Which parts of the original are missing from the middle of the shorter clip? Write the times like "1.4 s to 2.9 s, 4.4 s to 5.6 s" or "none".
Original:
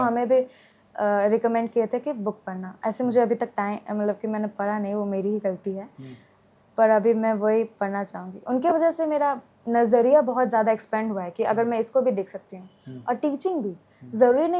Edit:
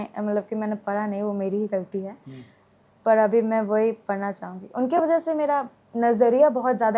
none